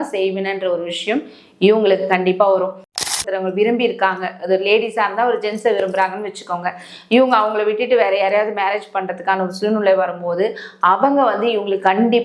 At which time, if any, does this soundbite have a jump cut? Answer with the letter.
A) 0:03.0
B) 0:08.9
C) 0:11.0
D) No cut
A